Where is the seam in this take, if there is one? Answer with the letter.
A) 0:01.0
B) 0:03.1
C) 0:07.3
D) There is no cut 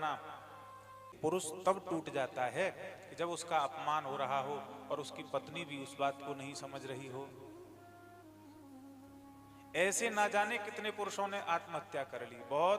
A